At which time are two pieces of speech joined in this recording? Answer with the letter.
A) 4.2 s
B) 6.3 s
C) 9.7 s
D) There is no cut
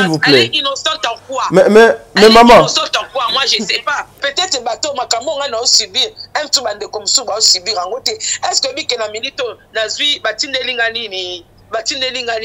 A